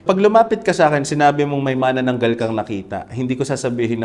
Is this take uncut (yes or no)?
yes